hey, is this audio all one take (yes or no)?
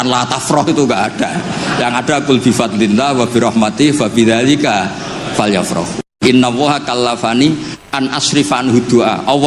no